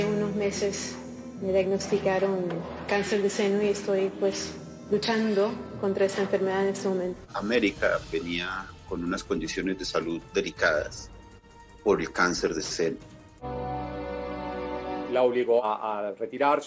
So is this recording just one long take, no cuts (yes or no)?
no